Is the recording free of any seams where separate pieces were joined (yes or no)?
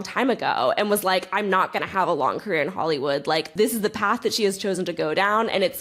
no